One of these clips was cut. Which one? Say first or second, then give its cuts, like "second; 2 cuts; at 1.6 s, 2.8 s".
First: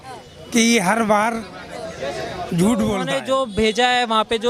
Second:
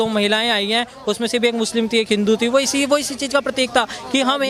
first; 1 cut; at 3.1 s